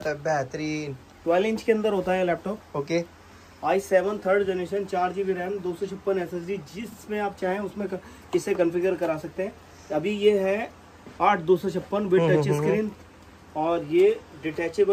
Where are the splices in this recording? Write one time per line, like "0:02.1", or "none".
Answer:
none